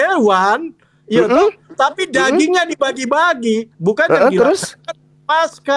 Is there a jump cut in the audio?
no; 0 cuts

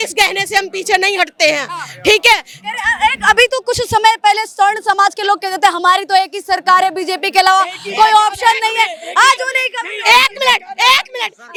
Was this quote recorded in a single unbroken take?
yes; 0 cuts

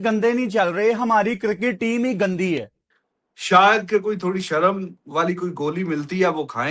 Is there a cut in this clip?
yes; 1 cut; at 2.8 s

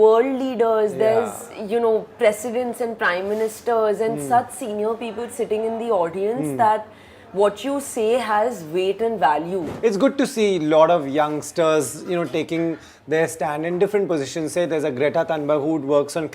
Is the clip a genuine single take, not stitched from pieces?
no; 1 cut; at 9.7 s

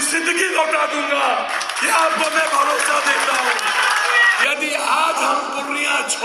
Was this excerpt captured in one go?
no; 1 cut; at 4.4 s

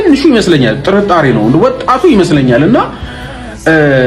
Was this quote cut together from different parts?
no; 0 cuts

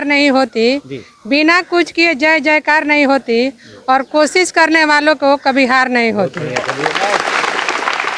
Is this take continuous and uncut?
yes; 0 cuts

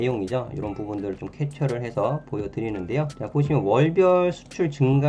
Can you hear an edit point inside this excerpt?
yes; 1 cut; at 3.2 s

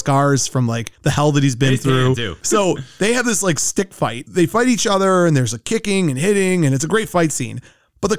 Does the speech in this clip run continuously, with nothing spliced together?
no; 1 cut; at 2.3 s

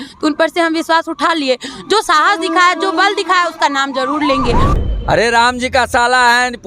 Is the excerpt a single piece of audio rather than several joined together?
no; 1 cut; at 4.7 s

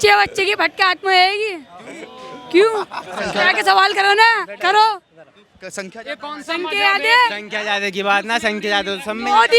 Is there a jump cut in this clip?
no; 0 cuts

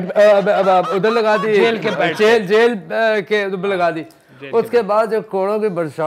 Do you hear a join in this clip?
no; 0 cuts

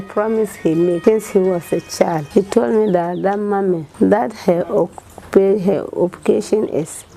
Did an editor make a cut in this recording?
yes; 3 cuts; at 1.0 s, 2.2 s, 3.9 s

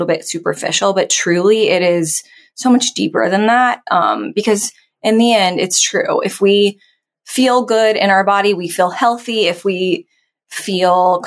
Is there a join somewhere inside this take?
no; 0 cuts

